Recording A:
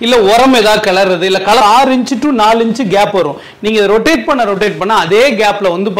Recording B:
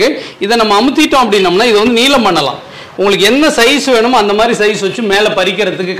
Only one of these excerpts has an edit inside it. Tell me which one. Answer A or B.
A